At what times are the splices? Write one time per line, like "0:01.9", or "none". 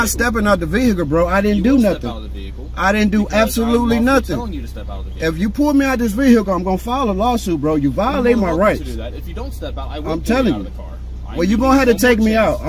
none

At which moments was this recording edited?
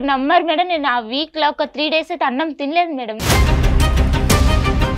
none

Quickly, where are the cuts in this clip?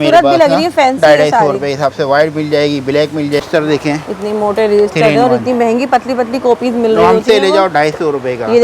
0:03.4

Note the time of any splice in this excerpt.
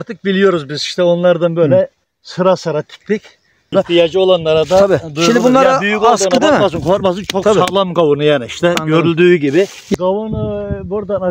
0:03.7
0:09.9

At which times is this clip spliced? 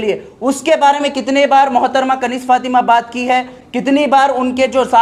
none

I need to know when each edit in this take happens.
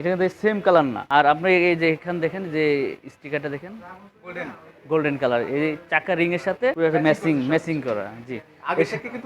0:01.0
0:06.8

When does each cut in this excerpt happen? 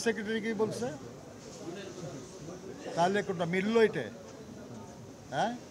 none

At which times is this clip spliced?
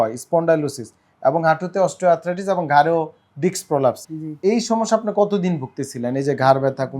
0:04.0

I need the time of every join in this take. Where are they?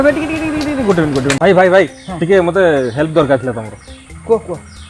0:01.4

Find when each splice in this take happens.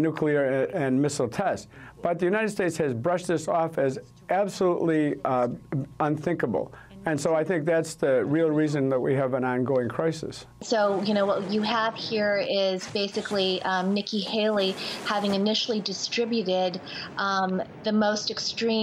0:03.9

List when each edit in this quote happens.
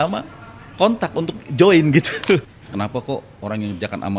0:02.5

